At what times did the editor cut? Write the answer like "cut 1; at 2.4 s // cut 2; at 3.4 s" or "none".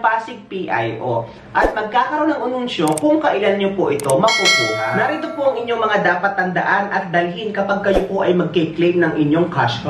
cut 1; at 4.6 s

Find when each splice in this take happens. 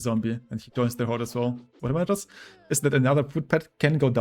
cut 1; at 1.8 s

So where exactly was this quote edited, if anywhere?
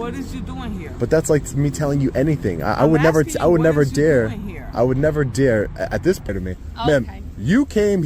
cut 1; at 6.3 s

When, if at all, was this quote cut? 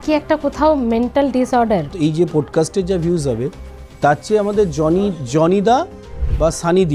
cut 1; at 1.9 s

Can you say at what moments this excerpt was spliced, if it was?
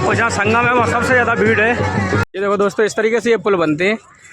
cut 1; at 2.3 s

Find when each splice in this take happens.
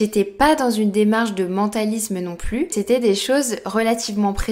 cut 1; at 2.7 s

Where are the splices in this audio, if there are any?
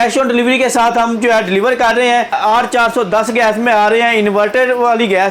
cut 1; at 2.4 s

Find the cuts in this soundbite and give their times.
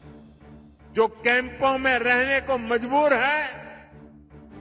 none

